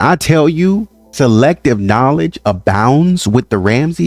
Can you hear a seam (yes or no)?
yes